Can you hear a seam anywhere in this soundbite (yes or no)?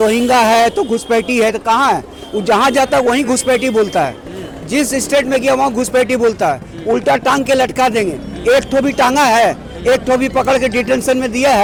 no